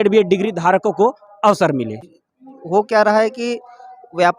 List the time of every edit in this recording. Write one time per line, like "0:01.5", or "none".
0:02.0